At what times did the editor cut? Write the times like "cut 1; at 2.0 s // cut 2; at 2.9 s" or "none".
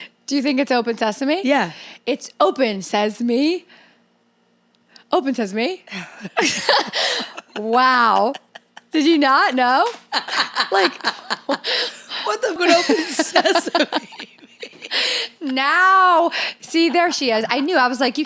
cut 1; at 12.6 s